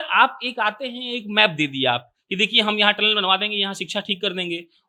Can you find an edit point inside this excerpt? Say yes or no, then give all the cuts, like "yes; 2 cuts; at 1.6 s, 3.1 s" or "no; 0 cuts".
no; 0 cuts